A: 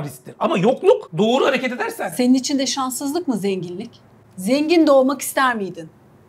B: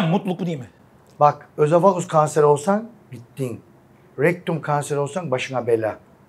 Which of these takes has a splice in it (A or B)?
A